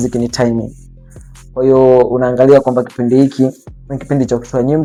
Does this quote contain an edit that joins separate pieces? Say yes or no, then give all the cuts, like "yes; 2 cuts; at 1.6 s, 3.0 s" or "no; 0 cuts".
no; 0 cuts